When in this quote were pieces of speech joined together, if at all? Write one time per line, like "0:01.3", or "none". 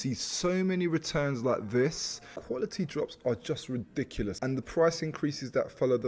0:02.4
0:04.4

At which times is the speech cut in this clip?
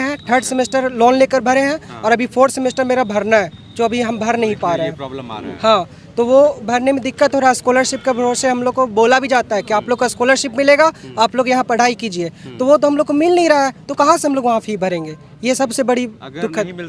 none

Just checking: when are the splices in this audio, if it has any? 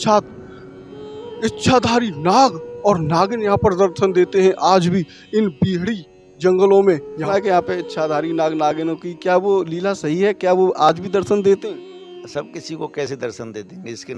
0:07.2

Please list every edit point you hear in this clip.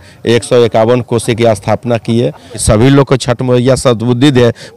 0:02.5

